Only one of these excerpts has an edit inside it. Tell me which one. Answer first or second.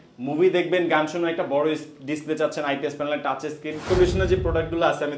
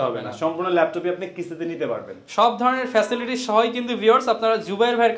first